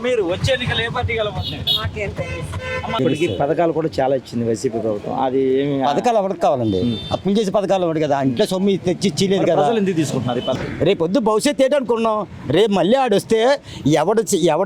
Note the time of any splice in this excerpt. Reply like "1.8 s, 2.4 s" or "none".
3.0 s, 10.5 s